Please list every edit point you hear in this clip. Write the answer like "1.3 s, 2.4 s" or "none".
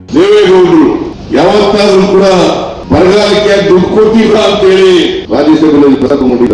1.1 s, 2.7 s, 5.2 s